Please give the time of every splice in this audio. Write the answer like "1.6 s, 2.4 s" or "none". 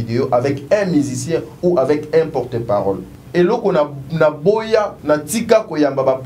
3.1 s, 5.0 s